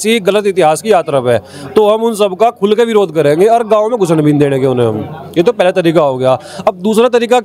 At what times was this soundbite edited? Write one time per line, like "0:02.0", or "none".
none

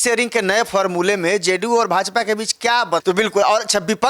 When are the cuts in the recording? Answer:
0:03.0

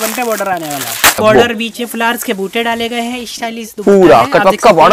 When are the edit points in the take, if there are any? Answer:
0:01.2

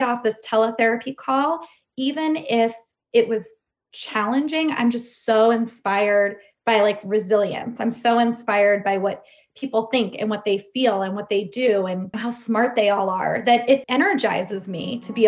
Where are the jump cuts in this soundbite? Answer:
0:12.2
0:13.9

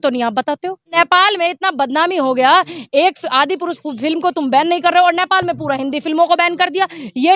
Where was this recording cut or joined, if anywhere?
0:00.9

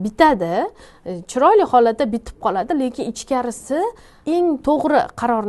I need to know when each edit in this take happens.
0:04.1

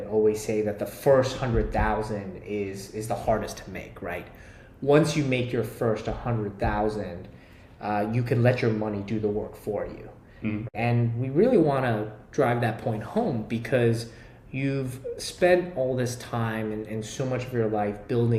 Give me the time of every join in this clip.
none

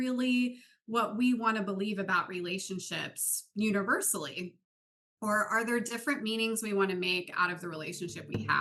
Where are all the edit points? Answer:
none

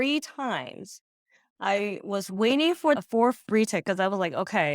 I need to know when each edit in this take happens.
0:03.0

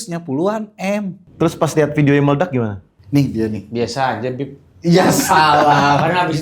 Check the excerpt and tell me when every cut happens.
0:01.2

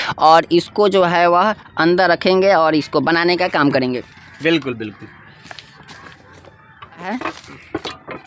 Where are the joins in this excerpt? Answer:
0:07.1

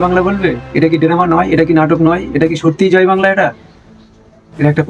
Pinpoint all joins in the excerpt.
none

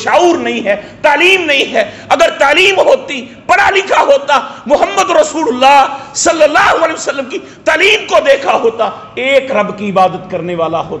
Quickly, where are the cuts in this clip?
none

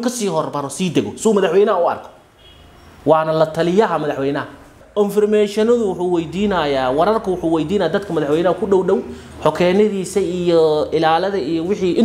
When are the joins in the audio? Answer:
0:04.8

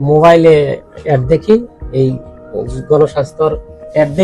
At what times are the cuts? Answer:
none

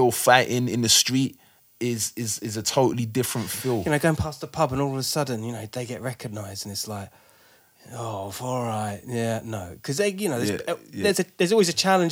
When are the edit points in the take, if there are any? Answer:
0:03.8

